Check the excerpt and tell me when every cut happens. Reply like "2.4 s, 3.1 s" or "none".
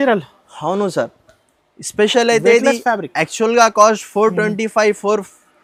none